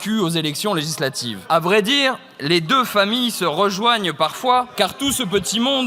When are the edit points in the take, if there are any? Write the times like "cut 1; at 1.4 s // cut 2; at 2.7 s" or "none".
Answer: cut 1; at 1.3 s // cut 2; at 4.7 s